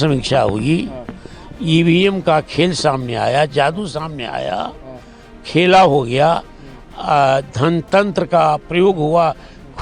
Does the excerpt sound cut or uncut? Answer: uncut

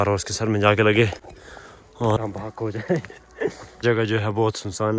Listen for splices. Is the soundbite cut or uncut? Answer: cut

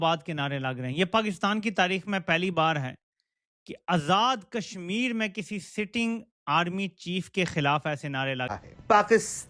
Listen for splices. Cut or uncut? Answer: uncut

